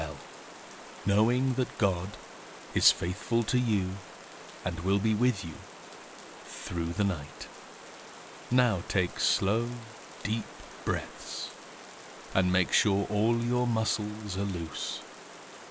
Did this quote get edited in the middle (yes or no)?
no